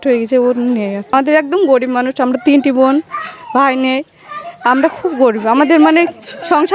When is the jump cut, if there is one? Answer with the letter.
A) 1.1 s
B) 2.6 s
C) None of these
A